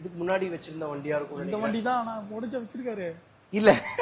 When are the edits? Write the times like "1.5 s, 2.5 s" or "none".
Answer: none